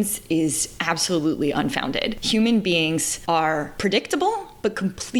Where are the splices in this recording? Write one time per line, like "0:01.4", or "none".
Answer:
0:02.2
0:03.4